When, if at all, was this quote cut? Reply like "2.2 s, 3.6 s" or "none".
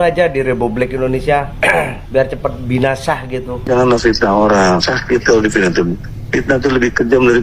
none

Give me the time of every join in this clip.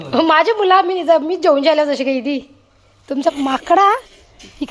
3.3 s

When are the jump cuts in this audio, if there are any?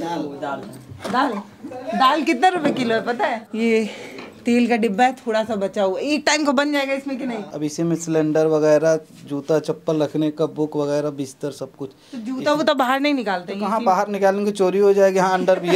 3.4 s, 7.5 s

